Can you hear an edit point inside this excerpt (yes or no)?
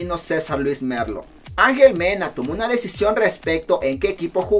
yes